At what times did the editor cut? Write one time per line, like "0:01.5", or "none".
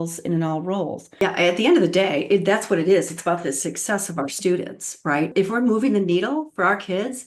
0:01.2
0:05.3